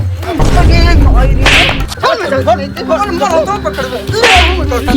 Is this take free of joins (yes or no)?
no